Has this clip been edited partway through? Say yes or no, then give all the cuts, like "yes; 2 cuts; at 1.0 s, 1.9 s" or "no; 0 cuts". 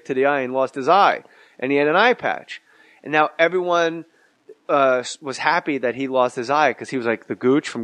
yes; 1 cut; at 2.3 s